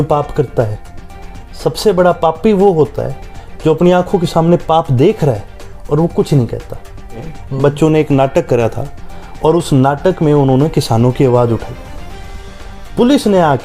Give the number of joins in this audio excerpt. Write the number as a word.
one